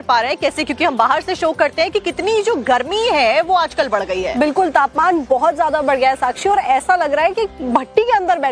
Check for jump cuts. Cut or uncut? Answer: cut